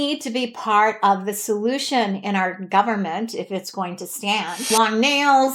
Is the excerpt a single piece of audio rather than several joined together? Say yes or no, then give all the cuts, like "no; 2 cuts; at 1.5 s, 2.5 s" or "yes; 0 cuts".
no; 1 cut; at 4.7 s